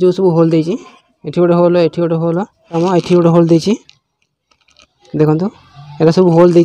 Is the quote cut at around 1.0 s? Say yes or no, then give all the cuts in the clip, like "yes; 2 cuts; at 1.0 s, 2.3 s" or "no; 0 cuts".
no; 1 cut; at 2.8 s